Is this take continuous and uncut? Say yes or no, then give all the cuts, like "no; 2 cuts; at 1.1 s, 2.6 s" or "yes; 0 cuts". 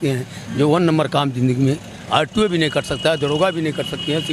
yes; 0 cuts